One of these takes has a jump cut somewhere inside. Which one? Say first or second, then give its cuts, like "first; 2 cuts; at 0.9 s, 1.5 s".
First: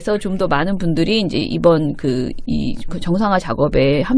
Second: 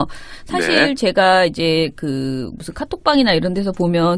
first; 1 cut; at 2.5 s